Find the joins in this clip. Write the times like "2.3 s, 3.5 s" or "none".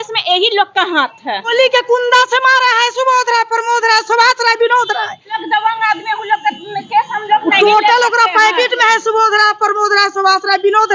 1.5 s, 5.4 s